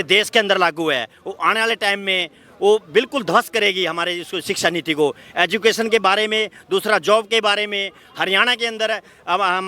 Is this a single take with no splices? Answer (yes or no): yes